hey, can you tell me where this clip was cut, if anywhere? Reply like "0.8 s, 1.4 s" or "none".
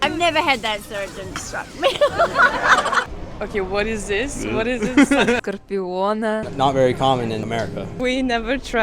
3.2 s, 5.4 s, 7.4 s